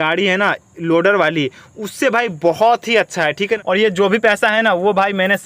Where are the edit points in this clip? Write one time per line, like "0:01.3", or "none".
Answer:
0:03.6